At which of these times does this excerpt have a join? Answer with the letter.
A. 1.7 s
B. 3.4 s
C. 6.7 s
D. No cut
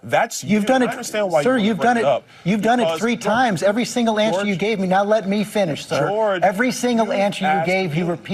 D